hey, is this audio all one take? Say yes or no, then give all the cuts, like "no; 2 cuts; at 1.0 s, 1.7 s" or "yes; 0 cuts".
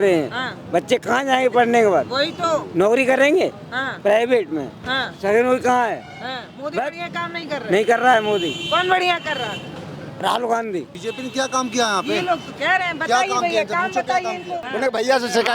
no; 2 cuts; at 10.9 s, 14.6 s